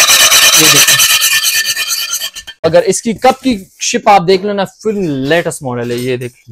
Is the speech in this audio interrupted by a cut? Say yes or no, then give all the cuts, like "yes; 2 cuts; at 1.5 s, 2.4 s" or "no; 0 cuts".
yes; 1 cut; at 2.6 s